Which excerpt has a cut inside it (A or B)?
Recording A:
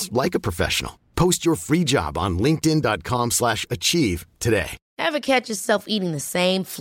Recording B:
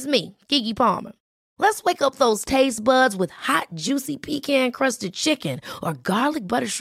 A